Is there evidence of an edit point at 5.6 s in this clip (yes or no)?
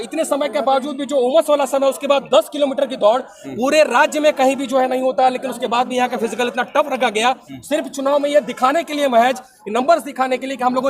no